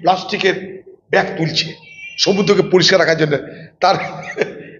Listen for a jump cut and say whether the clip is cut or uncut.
uncut